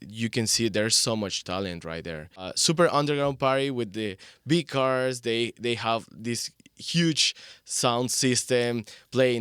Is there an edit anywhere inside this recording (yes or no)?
yes